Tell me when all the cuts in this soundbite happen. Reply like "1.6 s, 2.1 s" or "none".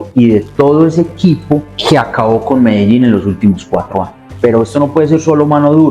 1.7 s, 4.2 s